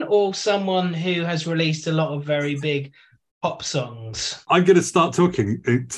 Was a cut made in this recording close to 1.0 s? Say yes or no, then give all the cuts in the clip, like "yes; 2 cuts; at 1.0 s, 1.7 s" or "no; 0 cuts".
no; 1 cut; at 4.4 s